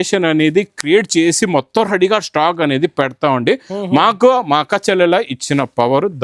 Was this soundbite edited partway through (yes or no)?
no